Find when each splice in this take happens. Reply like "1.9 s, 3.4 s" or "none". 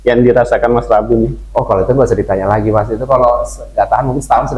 none